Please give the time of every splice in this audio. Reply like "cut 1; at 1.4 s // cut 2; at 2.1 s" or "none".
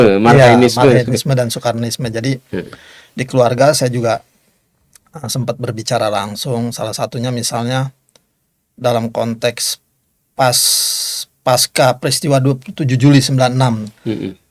none